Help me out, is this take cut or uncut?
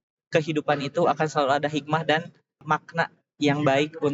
cut